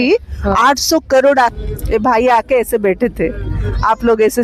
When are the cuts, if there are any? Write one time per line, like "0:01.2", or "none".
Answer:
0:01.5